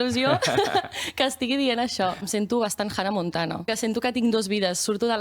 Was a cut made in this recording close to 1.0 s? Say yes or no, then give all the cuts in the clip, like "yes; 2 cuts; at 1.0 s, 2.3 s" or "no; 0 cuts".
no; 2 cuts; at 2.2 s, 3.7 s